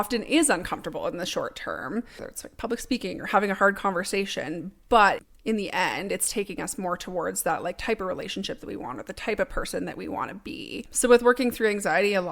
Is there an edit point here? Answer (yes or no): yes